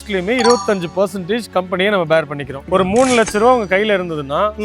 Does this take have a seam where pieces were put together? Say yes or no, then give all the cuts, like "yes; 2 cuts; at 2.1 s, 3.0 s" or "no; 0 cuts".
yes; 1 cut; at 2.6 s